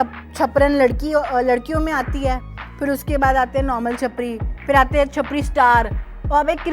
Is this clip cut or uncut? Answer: uncut